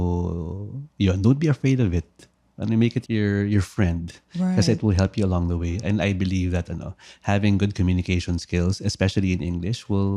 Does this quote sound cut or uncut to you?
uncut